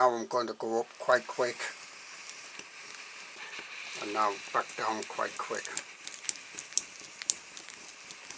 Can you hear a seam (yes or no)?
yes